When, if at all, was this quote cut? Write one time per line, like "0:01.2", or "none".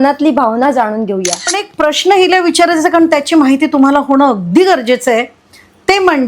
0:01.6